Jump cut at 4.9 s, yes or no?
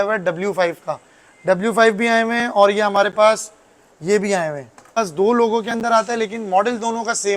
yes